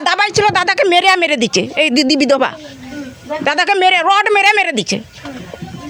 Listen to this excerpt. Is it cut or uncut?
uncut